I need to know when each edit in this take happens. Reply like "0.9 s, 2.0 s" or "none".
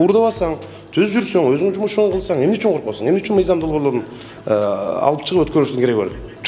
none